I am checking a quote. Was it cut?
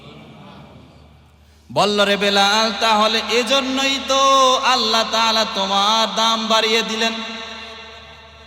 no; 0 cuts

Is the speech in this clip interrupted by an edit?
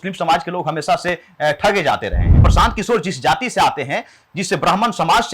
yes; 1 cut; at 2.4 s

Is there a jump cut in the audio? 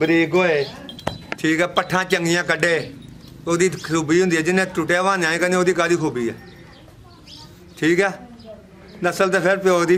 no; 0 cuts

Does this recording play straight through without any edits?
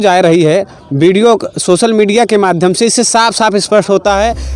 yes; 0 cuts

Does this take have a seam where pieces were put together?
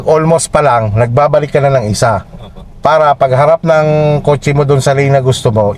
no; 0 cuts

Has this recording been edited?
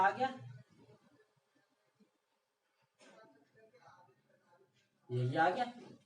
no; 0 cuts

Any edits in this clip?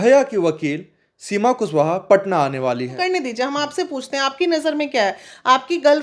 yes; 1 cut; at 3.0 s

